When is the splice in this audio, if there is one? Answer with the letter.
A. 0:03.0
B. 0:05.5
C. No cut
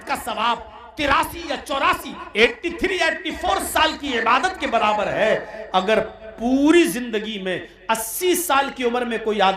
C